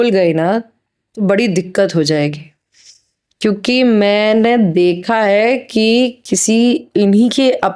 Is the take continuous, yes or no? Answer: yes